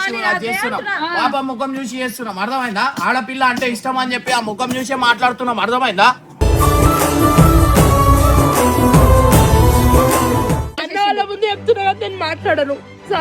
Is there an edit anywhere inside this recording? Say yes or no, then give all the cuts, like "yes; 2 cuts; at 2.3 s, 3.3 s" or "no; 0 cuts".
yes; 1 cut; at 10.8 s